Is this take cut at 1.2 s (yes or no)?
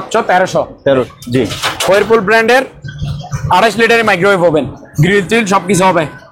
yes